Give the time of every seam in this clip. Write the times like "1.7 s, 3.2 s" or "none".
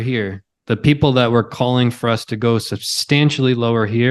none